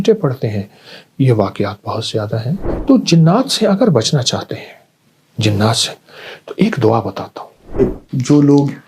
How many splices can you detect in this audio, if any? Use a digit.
2